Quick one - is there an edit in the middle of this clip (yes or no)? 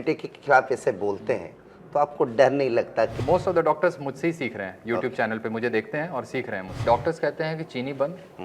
yes